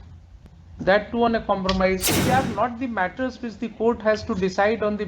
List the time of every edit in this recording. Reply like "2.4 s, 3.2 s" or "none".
2.1 s